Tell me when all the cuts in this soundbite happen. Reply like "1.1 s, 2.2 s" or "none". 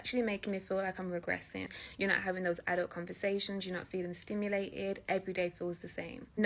1.8 s